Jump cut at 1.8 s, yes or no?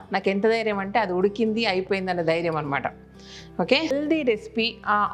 no